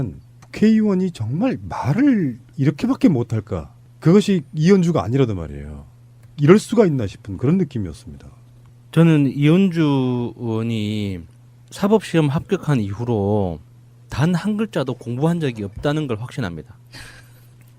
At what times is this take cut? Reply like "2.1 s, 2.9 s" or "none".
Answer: 15.4 s